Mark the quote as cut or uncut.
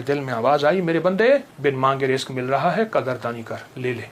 cut